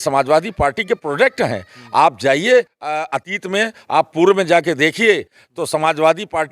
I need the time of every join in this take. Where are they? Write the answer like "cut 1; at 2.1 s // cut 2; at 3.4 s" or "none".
none